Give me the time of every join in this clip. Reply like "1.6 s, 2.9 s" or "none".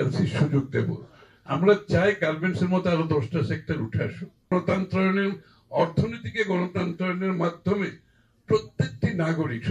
4.5 s